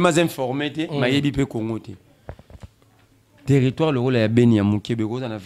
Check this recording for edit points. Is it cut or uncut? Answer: uncut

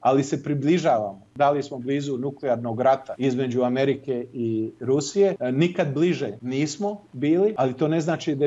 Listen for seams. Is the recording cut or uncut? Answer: cut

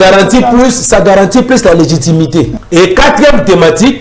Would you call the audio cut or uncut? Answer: cut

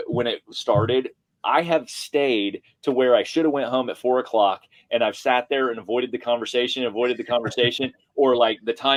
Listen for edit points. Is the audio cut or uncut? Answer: uncut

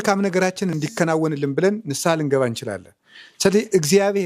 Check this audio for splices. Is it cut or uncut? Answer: uncut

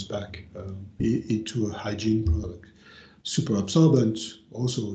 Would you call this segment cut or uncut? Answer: uncut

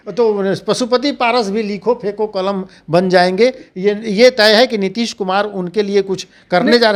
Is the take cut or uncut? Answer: uncut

